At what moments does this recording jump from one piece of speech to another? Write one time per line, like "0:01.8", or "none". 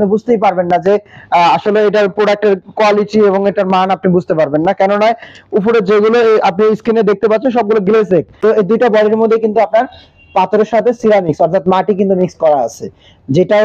0:08.4